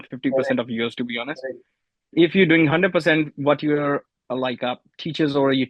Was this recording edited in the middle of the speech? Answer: no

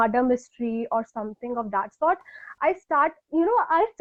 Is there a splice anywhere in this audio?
no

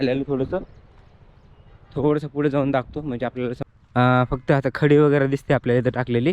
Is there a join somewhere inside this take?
yes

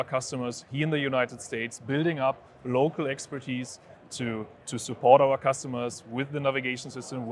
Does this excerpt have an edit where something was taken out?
no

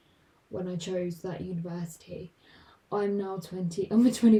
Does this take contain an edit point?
no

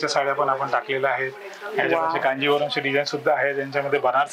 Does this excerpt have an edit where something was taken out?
no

